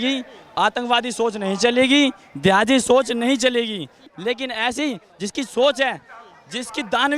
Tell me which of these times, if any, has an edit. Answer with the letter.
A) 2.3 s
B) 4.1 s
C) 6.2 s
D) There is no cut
B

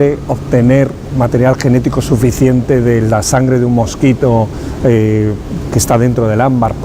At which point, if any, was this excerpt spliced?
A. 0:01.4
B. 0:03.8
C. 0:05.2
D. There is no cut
C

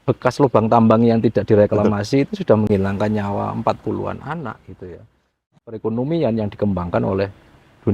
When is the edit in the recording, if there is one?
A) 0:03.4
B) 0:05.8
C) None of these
B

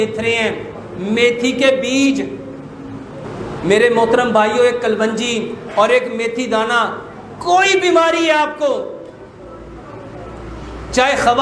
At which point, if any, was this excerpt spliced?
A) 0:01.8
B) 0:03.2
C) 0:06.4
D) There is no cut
B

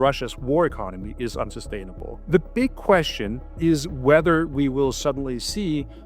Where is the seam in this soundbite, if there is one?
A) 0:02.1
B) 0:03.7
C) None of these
A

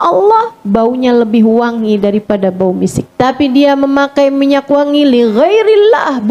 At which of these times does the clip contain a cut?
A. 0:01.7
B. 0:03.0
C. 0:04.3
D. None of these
B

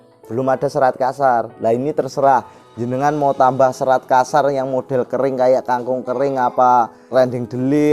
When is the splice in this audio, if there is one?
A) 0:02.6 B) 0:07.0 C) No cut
B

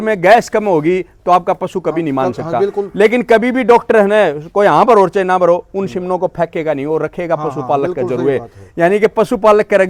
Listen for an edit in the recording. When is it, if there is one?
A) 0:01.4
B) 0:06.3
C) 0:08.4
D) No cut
D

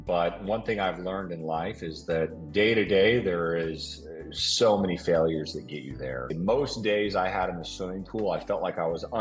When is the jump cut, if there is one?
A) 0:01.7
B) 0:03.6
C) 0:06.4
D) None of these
C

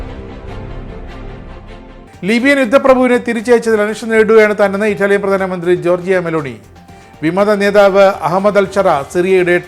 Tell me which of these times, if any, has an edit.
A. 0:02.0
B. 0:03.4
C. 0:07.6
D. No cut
A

